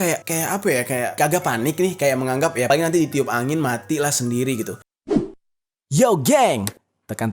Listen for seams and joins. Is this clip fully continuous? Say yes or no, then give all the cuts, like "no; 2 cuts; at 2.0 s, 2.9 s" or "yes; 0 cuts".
no; 1 cut; at 4.9 s